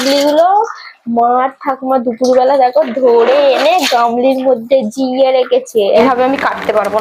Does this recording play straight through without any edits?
no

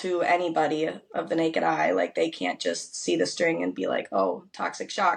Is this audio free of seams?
yes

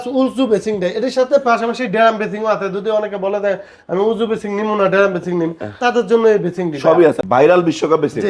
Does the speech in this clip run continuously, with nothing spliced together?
no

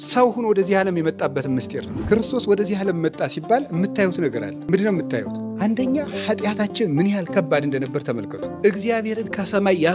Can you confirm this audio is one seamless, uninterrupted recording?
no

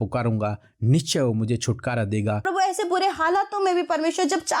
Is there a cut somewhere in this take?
yes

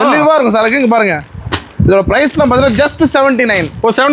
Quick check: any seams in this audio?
no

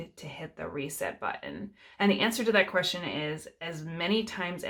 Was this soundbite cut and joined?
no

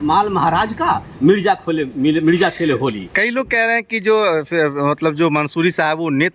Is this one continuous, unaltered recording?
yes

